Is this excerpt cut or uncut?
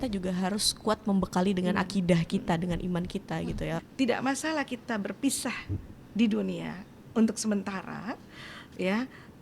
cut